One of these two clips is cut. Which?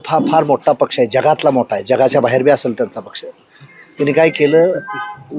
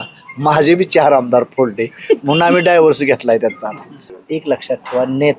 second; 1 cut; at 4.1 s

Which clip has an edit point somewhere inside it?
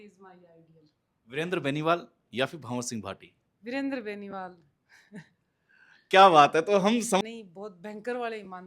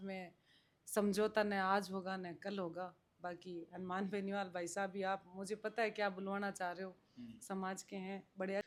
first; 1 cut; at 7.2 s

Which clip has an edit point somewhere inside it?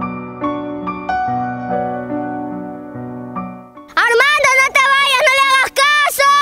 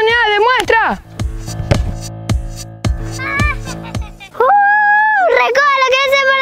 first; 1 cut; at 3.6 s

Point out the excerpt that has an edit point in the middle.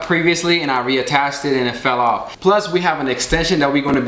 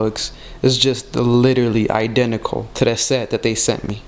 first; 1 cut; at 2.3 s

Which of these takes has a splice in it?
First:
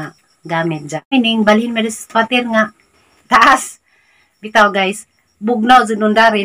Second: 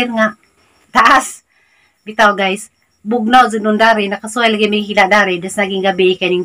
first; 1 cut; at 1.1 s

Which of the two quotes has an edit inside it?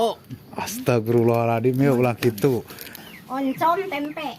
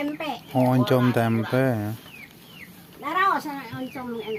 first; 1 cut; at 3.0 s

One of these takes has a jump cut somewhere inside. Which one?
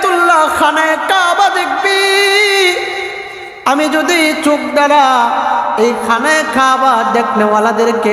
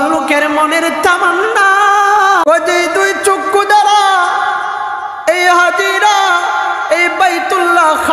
second; 1 cut; at 2.4 s

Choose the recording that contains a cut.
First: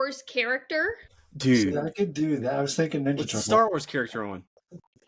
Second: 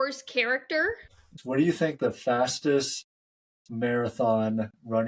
second; 1 cut; at 1.3 s

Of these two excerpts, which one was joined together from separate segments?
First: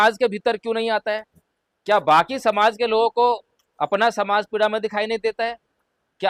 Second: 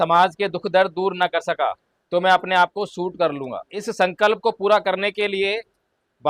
second; 2 cuts; at 1.9 s, 3.8 s

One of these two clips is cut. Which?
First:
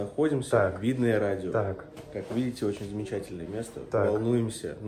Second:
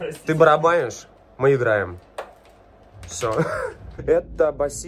second; 1 cut; at 3.9 s

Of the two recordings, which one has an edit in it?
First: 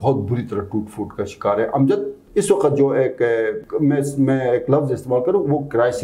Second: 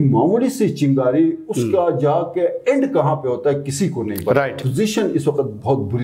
second; 1 cut; at 4.6 s

